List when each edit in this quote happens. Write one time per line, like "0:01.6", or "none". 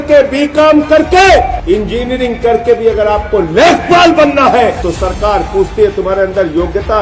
0:01.6
0:04.8